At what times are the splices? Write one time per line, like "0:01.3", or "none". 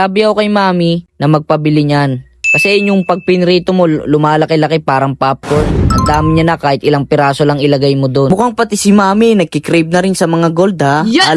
0:08.3